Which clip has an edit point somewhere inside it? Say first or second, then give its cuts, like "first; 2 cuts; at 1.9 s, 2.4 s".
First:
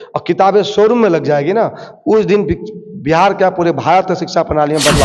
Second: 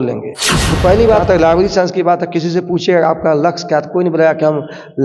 second; 1 cut; at 1.2 s